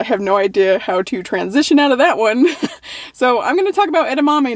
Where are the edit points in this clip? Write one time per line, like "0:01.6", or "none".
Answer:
none